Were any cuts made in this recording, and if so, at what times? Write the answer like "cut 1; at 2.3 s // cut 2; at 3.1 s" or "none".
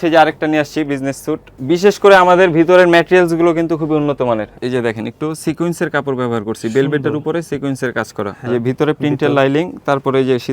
cut 1; at 1.5 s // cut 2; at 4.5 s // cut 3; at 8.4 s